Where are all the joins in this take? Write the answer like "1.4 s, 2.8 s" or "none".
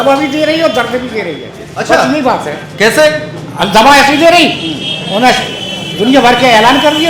none